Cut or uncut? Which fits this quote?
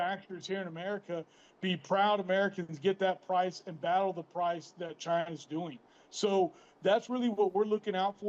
uncut